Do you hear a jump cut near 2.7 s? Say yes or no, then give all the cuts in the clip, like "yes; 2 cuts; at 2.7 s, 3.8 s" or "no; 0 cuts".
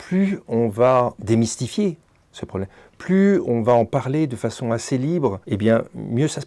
no; 2 cuts; at 1.2 s, 5.4 s